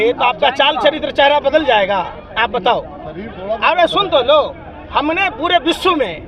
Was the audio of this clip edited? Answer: no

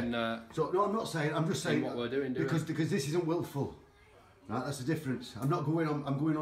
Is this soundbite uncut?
yes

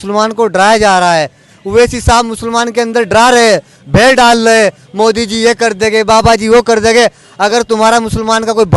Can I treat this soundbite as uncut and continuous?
no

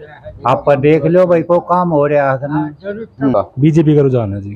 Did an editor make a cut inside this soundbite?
yes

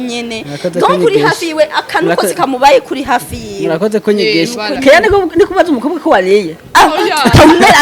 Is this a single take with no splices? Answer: yes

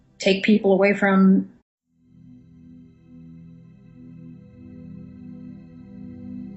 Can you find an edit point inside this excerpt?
no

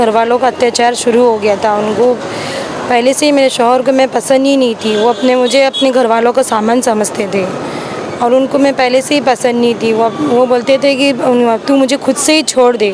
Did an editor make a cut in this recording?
no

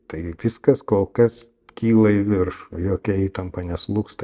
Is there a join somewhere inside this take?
no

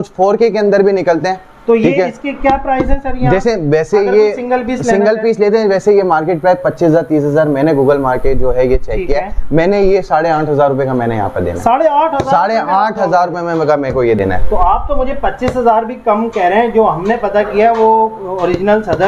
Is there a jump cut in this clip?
no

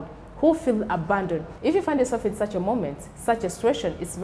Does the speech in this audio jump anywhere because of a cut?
yes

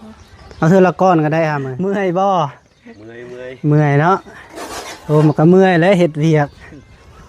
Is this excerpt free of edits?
no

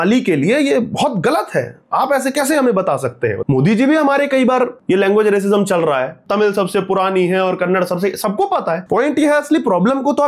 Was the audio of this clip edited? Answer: yes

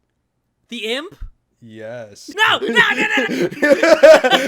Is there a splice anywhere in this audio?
yes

